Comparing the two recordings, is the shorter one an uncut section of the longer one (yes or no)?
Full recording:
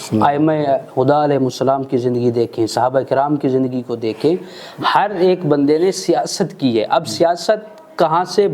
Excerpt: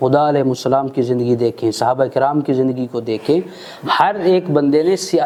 yes